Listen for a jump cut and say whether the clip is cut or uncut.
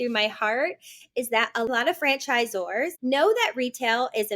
cut